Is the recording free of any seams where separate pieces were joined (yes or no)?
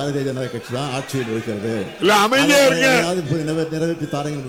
no